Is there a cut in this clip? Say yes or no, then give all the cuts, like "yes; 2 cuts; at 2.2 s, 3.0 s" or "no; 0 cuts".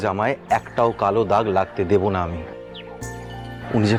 no; 0 cuts